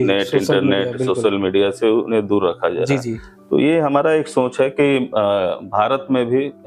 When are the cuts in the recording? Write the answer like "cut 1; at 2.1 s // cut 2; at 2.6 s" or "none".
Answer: none